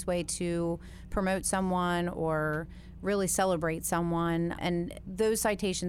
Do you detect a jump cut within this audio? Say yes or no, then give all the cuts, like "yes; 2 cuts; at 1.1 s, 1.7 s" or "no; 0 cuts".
yes; 1 cut; at 4.6 s